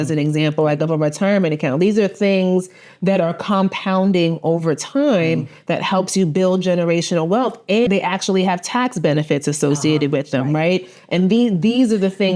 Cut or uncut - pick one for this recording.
cut